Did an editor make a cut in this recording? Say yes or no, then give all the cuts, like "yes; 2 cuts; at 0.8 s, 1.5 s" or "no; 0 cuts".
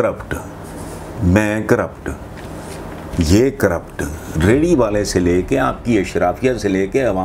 no; 0 cuts